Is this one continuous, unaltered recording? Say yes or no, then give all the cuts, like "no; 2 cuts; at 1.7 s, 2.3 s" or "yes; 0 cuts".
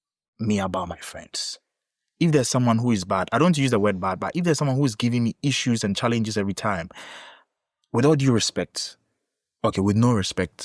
yes; 0 cuts